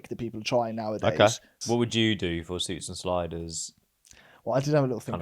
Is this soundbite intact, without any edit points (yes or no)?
no